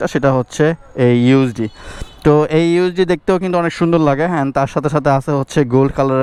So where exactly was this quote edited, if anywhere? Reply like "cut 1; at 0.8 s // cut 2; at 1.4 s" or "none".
none